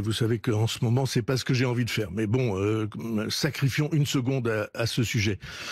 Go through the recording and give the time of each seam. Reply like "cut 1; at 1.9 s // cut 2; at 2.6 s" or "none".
none